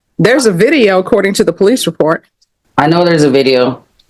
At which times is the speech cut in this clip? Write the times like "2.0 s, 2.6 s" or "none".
2.7 s

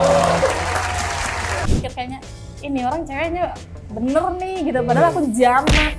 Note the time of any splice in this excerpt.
1.7 s

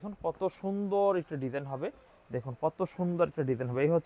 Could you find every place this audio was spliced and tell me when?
none

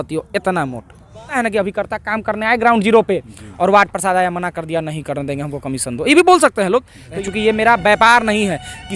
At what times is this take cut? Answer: 1.3 s, 7.1 s

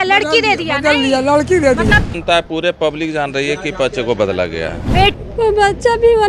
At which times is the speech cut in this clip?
2.1 s, 5.1 s

